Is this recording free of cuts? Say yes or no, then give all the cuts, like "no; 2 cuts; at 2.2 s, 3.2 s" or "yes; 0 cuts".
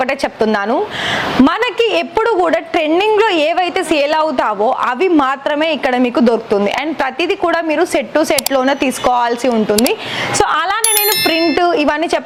yes; 0 cuts